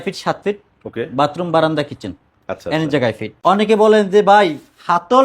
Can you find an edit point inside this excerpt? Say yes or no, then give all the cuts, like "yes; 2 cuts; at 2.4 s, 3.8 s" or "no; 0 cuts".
yes; 1 cut; at 3.3 s